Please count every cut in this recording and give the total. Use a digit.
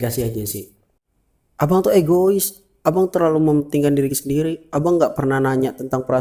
1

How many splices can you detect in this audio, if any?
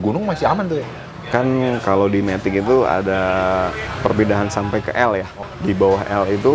3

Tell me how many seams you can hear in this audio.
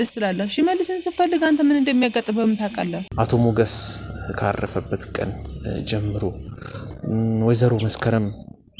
1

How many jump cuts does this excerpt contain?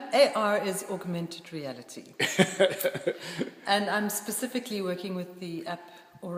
0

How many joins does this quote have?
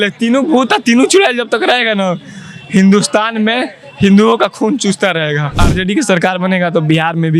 1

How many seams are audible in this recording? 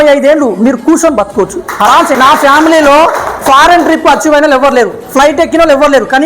1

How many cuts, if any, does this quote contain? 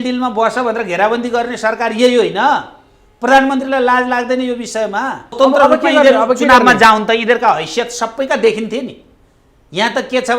1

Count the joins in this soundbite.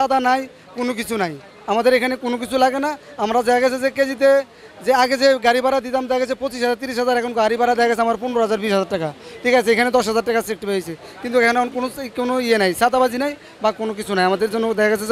0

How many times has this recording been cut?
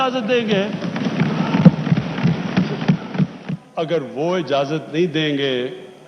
1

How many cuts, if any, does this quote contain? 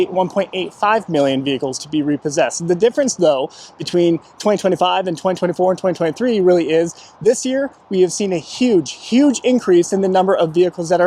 0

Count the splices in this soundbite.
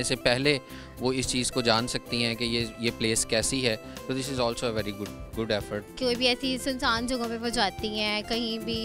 1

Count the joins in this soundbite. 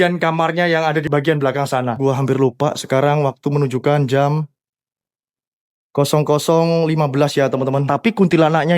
3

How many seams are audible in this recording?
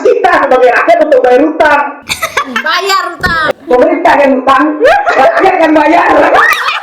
1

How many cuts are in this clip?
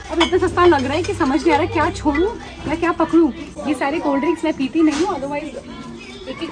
0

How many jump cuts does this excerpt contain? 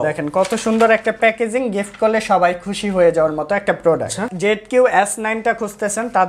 1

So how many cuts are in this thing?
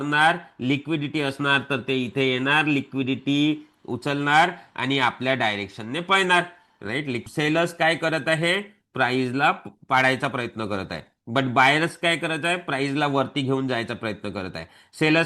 1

